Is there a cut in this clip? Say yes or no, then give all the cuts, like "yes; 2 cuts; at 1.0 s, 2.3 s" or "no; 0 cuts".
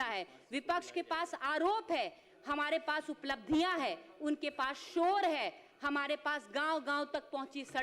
no; 0 cuts